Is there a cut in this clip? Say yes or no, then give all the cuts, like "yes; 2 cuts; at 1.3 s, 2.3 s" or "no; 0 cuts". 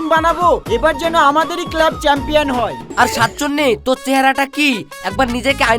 yes; 1 cut; at 2.9 s